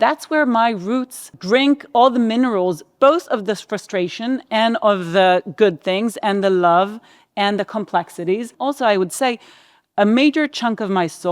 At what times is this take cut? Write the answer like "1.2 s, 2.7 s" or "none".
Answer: 1.3 s, 8.5 s